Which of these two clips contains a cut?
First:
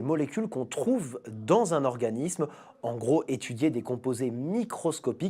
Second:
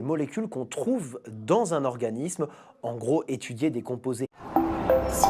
first; 1 cut; at 4.3 s

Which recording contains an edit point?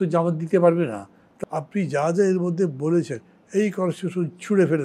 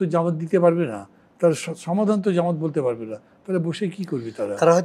first; 1 cut; at 1.2 s

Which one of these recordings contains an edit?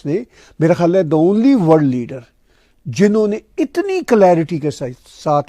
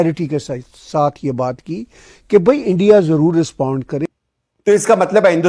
second; 1 cut; at 4.0 s

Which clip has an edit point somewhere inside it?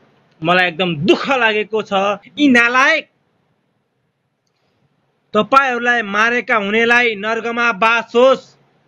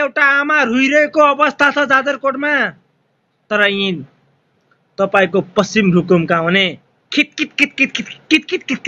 first; 1 cut; at 2.2 s

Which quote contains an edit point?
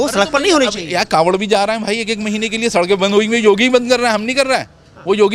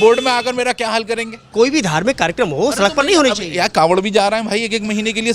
second; 1 cut; at 1.5 s

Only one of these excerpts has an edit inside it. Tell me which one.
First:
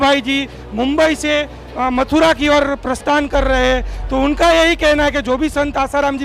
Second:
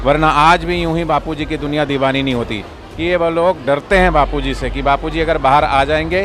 second; 1 cut; at 2.8 s

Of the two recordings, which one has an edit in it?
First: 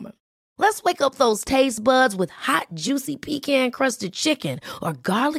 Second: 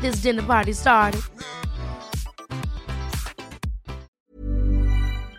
second; 1 cut; at 4.1 s

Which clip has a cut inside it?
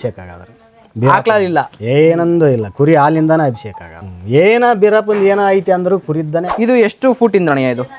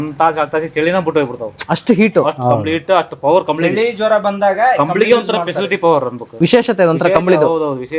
first; 2 cuts; at 4.0 s, 6.5 s

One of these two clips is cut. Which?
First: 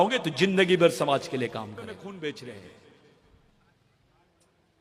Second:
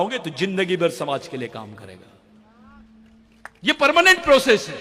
first; 1 cut; at 2.0 s

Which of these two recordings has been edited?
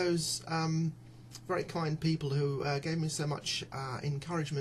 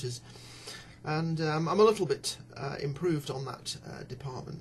first; 1 cut; at 3.5 s

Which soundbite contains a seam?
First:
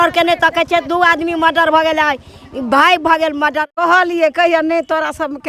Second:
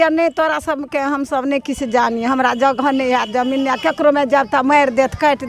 first; 1 cut; at 3.6 s

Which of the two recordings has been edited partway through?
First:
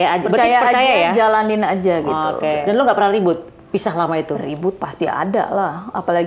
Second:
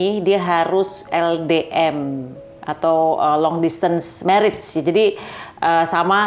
first; 1 cut; at 2.6 s

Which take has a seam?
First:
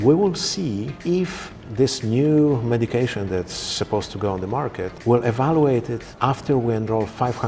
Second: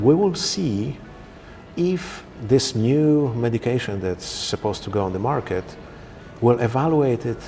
first; 3 cuts; at 0.9 s, 4.9 s, 6.0 s

